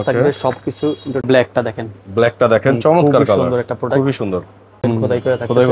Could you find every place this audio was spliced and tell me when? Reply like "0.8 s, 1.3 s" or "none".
1.2 s, 4.8 s

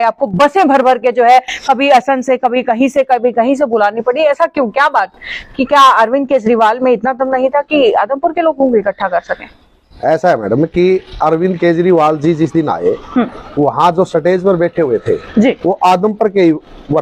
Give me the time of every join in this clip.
none

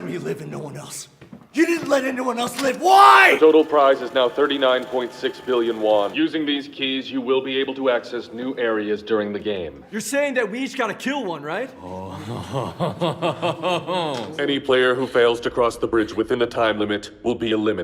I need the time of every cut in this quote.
3.3 s, 6.1 s, 11.7 s, 14.3 s

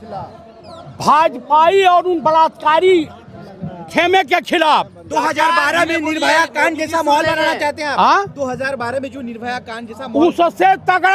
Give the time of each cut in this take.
none

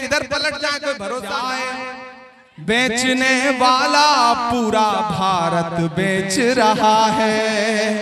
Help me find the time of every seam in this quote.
1.4 s

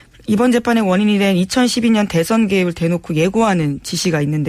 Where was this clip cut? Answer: 1.7 s

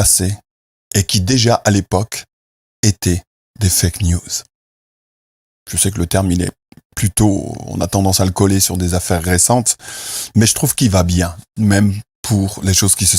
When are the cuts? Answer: none

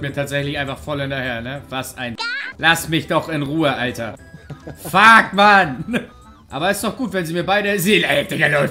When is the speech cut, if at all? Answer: none

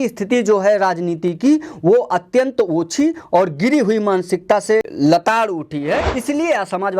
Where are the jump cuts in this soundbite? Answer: 4.9 s, 6.1 s

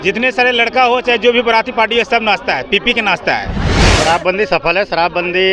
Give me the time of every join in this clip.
3.8 s

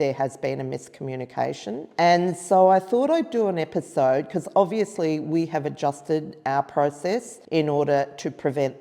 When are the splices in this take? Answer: 1.9 s, 7.4 s

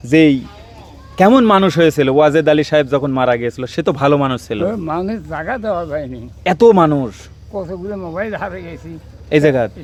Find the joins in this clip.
none

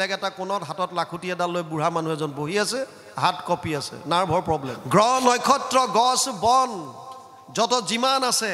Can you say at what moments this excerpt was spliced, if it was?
4.8 s

